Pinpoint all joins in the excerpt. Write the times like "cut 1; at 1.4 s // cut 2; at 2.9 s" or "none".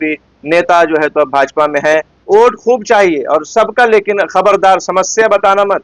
cut 1; at 2.1 s

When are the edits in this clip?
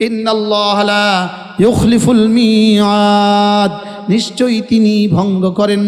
none

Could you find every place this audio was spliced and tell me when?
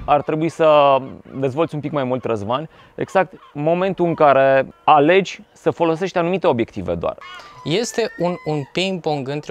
cut 1; at 4.7 s // cut 2; at 7.2 s

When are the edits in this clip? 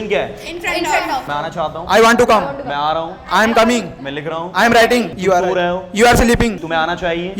cut 1; at 1.3 s

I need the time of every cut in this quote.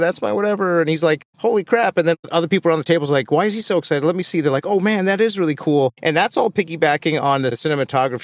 none

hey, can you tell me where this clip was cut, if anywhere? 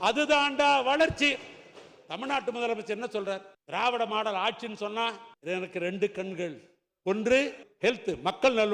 cut 1; at 3.5 s // cut 2; at 5.3 s // cut 3; at 7.6 s

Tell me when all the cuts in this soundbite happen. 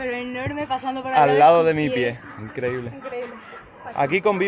none

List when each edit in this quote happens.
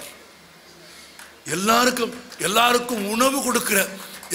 none

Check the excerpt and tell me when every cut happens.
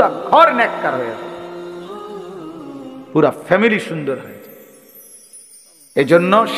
cut 1; at 1.5 s // cut 2; at 3.1 s

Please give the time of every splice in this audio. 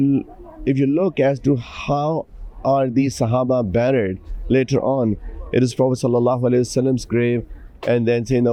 none

